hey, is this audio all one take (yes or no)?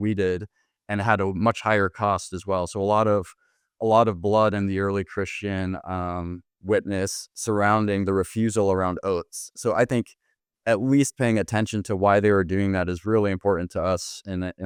yes